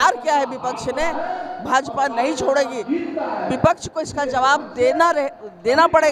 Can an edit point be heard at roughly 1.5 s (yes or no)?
no